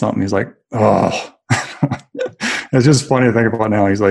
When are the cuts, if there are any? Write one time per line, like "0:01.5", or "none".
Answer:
none